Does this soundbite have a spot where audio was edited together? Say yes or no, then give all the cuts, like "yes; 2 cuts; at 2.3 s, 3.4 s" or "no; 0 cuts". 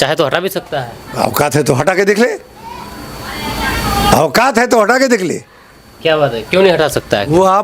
no; 0 cuts